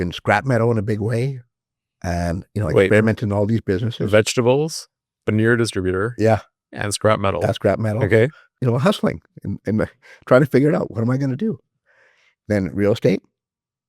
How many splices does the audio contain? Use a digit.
1